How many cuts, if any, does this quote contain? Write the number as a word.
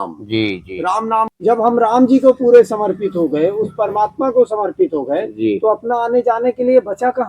one